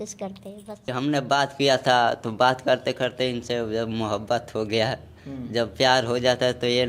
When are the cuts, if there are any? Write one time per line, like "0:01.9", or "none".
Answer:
0:00.9